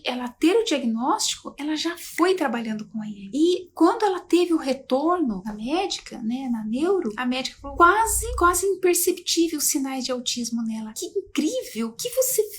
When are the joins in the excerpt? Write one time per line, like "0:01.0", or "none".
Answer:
0:05.4